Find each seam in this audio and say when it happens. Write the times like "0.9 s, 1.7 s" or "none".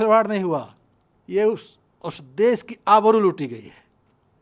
none